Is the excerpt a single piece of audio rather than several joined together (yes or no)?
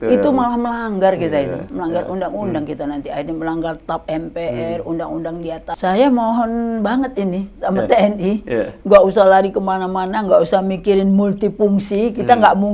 no